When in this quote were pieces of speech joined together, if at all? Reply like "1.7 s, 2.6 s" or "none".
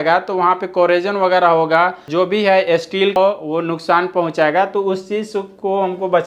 2.0 s, 3.2 s